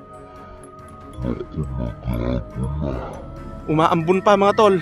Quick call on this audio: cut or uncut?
uncut